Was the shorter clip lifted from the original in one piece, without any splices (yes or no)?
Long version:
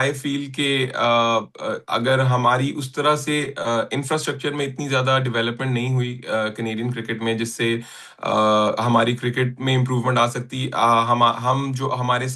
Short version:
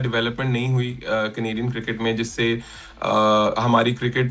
yes